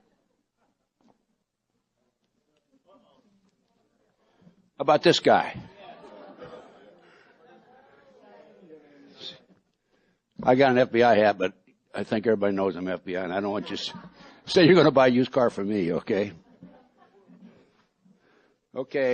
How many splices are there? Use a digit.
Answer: 0